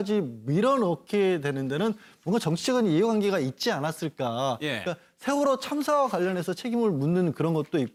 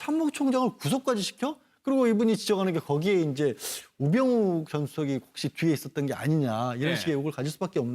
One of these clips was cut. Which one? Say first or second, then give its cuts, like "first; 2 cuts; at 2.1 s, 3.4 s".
second; 1 cut; at 4.3 s